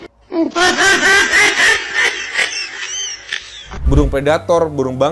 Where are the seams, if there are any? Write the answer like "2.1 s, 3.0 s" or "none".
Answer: 3.7 s